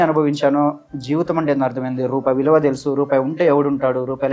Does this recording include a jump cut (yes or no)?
no